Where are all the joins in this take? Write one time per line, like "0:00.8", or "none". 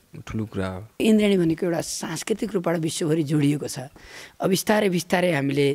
0:01.0